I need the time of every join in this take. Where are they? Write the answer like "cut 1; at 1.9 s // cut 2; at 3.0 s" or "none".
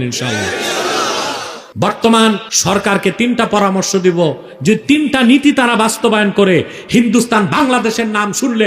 cut 1; at 1.6 s // cut 2; at 2.5 s